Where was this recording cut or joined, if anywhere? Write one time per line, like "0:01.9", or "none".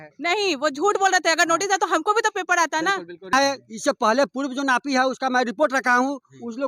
0:03.3

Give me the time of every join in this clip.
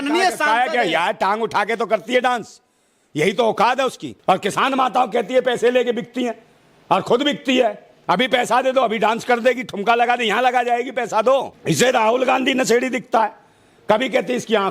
0:04.1
0:11.5

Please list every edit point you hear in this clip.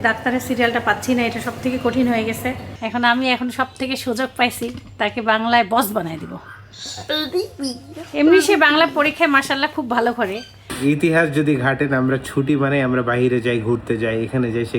0:02.7
0:10.7

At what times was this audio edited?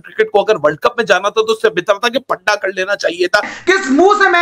0:03.5

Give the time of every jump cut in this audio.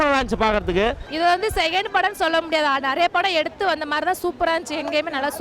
0:01.1

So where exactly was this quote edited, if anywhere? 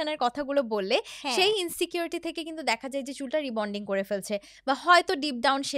none

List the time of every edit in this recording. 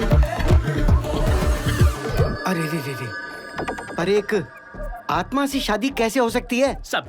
0:01.5

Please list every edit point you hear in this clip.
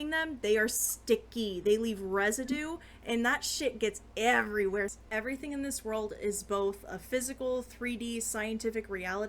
0:04.9

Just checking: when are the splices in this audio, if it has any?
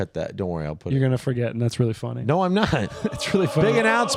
none

